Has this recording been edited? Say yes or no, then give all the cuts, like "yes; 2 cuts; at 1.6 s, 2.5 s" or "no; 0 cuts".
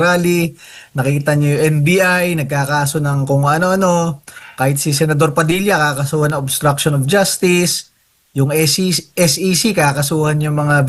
no; 0 cuts